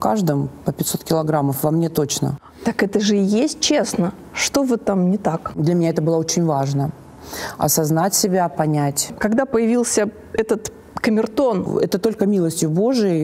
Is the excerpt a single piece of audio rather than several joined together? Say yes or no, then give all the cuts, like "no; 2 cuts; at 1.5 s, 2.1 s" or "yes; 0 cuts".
no; 4 cuts; at 2.3 s, 5.6 s, 9.1 s, 11.7 s